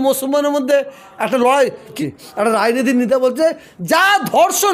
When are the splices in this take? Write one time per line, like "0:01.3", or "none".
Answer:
0:01.9